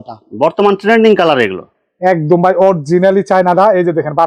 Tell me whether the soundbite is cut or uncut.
uncut